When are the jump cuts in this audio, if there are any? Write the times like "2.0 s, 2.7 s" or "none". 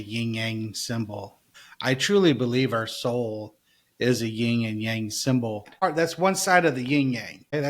1.5 s, 5.7 s